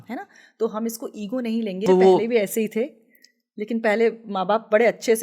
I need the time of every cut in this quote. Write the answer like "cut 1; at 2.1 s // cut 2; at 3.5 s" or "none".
cut 1; at 1.8 s

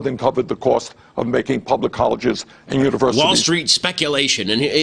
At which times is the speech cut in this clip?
none

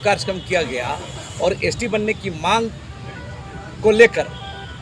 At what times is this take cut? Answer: none

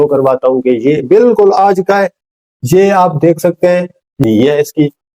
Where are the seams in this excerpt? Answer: cut 1; at 4.2 s

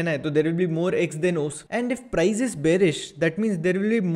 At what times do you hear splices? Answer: cut 1; at 1.6 s

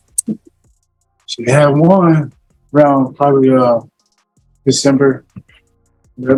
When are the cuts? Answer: none

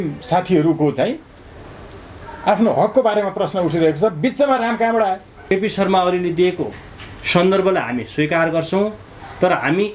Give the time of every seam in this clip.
cut 1; at 5.5 s

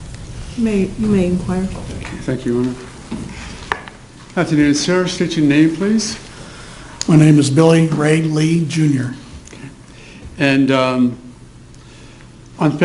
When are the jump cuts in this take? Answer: none

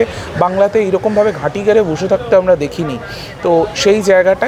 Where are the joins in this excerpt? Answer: none

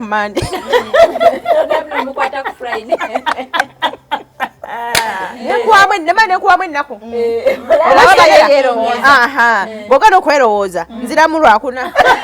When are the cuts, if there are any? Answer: cut 1; at 5.3 s

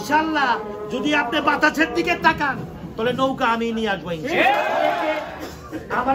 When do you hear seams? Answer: cut 1; at 5.2 s

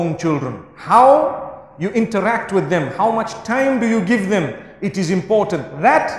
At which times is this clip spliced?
none

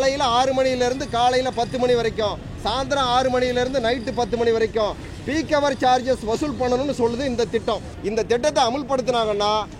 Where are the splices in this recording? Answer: cut 1; at 7.9 s

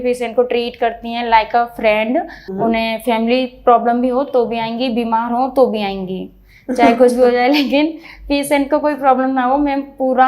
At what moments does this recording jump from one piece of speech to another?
cut 1; at 2.4 s

